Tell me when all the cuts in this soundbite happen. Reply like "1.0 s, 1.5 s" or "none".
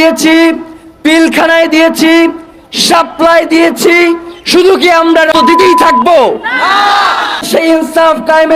5.4 s, 7.5 s